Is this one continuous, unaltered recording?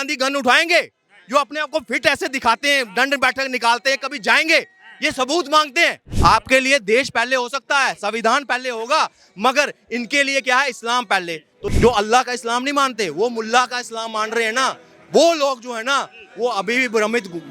no; 2 cuts; at 6.1 s, 11.6 s

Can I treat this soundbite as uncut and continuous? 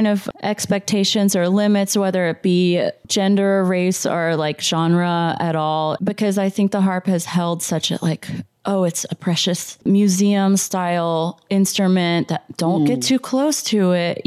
yes; 0 cuts

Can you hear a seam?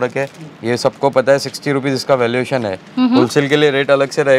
no; 0 cuts

